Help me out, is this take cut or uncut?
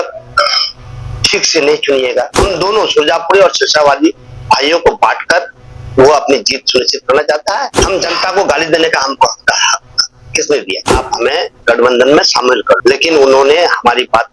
cut